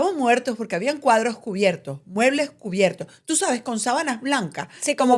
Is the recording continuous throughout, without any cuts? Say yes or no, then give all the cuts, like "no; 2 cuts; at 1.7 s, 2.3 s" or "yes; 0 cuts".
yes; 0 cuts